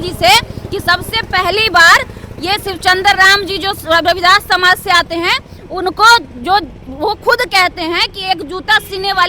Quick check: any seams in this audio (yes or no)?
no